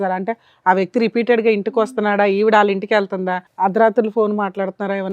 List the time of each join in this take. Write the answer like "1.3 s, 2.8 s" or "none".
3.4 s